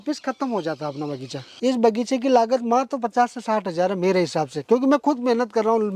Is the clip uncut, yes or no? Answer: no